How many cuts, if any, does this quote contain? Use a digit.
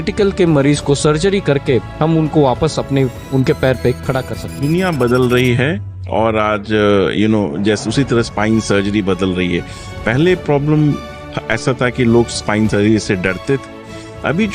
1